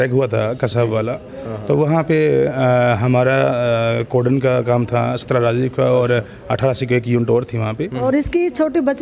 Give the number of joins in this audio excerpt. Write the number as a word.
one